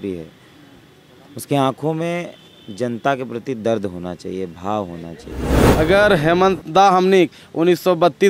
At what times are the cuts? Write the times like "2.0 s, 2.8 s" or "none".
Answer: 5.6 s